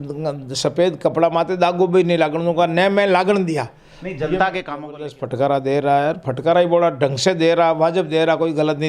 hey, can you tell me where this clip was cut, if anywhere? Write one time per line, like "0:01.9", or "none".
0:05.0